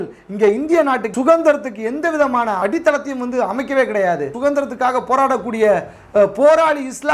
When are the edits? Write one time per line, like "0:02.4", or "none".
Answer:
0:01.1
0:02.6
0:04.3